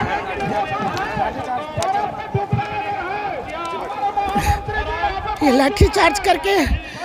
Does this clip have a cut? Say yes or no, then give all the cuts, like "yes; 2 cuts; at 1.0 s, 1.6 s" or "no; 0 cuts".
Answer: no; 0 cuts